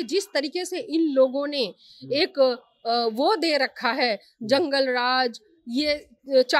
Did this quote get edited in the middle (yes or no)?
no